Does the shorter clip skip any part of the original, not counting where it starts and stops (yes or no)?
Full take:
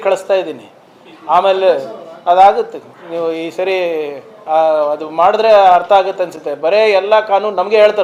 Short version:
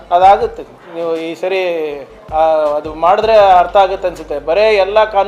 no